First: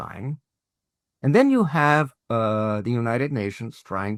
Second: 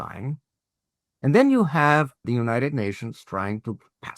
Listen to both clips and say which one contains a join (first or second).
second